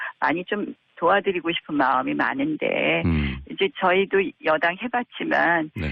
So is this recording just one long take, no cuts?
yes; 0 cuts

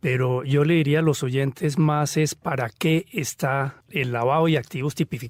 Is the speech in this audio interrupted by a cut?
no; 0 cuts

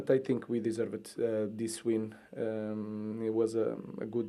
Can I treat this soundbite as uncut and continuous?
yes; 0 cuts

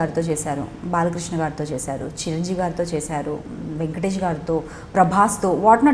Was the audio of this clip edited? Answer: no; 0 cuts

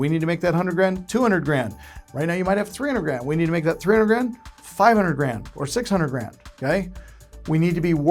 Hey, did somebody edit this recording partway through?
no; 0 cuts

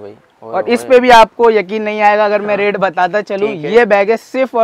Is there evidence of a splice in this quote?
no; 0 cuts

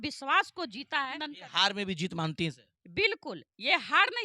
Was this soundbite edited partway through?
yes; 1 cut; at 1.3 s

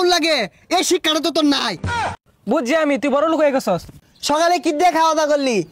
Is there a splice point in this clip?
yes; 2 cuts; at 2.2 s, 3.9 s

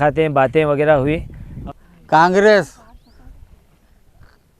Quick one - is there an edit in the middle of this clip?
yes; 1 cut; at 1.6 s

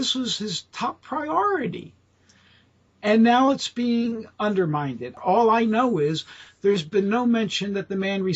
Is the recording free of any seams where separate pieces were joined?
no; 1 cut; at 5.1 s

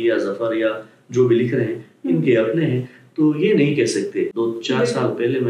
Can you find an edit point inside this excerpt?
yes; 1 cut; at 4.3 s

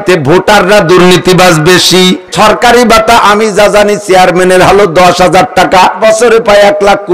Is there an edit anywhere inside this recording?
yes; 2 cuts; at 2.3 s, 6.0 s

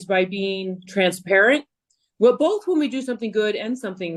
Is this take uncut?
yes; 0 cuts

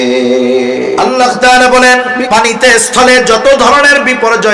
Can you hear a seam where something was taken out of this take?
yes; 1 cut; at 1.0 s

